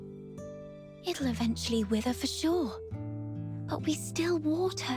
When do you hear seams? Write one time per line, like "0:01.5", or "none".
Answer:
0:00.9